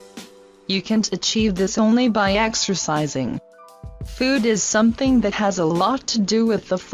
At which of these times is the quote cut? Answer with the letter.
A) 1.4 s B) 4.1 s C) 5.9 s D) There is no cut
B